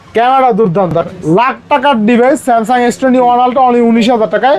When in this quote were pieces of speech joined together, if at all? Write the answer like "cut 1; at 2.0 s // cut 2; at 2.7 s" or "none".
cut 1; at 1.0 s